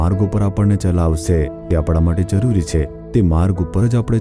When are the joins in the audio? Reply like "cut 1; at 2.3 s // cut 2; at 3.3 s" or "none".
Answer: cut 1; at 1.6 s

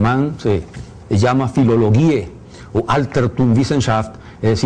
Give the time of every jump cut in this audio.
cut 1; at 2.0 s

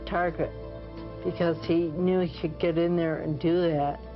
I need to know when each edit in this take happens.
cut 1; at 2.8 s

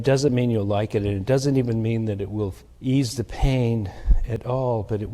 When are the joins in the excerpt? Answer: cut 1; at 2.7 s

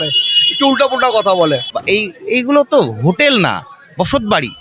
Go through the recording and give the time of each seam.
cut 1; at 1.6 s

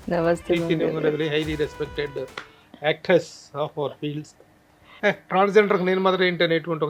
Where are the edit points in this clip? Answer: cut 1; at 4.9 s

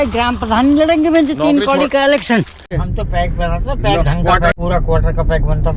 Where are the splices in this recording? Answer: cut 1; at 2.7 s // cut 2; at 4.6 s

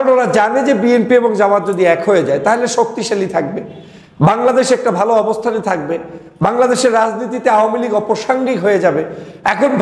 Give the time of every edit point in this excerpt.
none

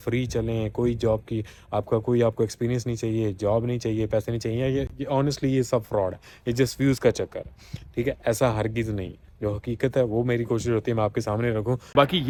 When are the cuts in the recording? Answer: none

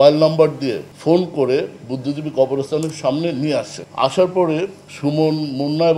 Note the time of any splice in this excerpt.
cut 1; at 0.9 s // cut 2; at 3.8 s // cut 3; at 4.8 s

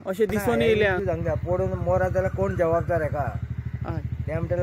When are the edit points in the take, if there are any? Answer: cut 1; at 1.0 s

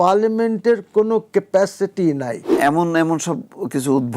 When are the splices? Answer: cut 1; at 2.6 s

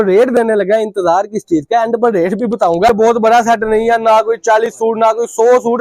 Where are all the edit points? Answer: cut 1; at 2.9 s

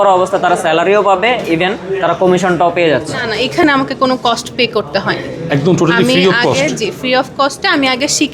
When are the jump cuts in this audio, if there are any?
cut 1; at 3.1 s

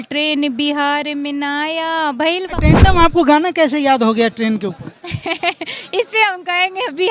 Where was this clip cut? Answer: cut 1; at 2.5 s

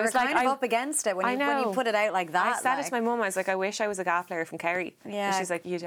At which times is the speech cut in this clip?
none

